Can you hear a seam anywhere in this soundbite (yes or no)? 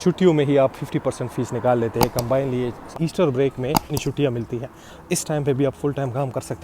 yes